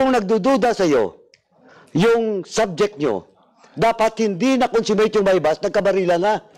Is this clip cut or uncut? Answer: uncut